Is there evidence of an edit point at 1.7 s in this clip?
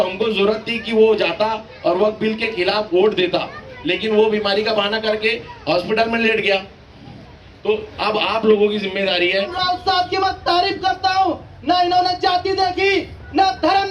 no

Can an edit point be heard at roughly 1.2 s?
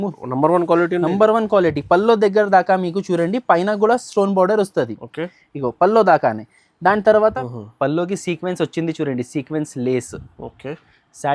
no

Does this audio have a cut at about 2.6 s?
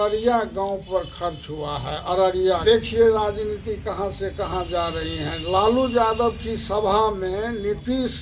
yes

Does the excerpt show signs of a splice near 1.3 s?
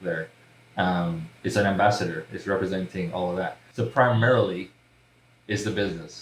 no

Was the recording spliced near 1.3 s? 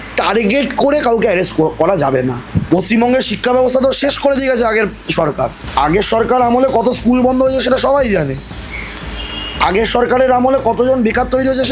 no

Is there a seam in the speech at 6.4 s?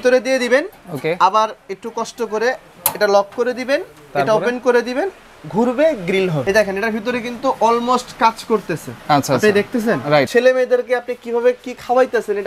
yes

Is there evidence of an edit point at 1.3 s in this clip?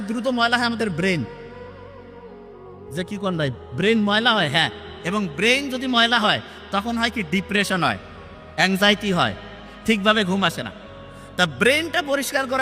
no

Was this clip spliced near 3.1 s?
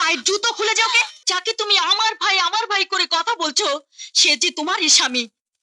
no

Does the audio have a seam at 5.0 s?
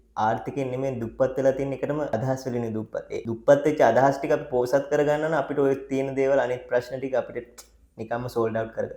no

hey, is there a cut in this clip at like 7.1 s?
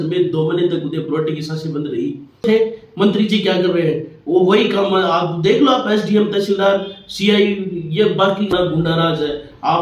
no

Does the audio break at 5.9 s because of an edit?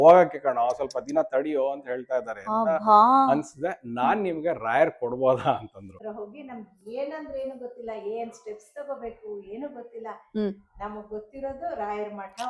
yes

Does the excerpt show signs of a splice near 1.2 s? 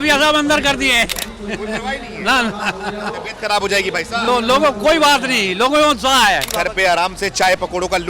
yes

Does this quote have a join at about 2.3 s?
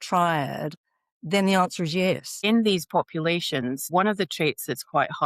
yes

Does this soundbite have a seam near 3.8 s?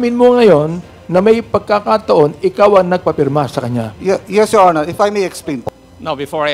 no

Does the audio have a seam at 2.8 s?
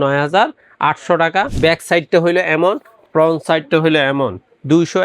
no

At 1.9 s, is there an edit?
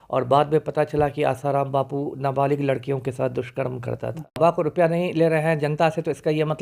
no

